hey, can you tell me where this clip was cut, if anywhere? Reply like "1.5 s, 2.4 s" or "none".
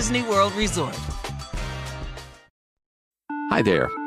2.4 s